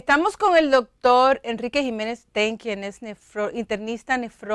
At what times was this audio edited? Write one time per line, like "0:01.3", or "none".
none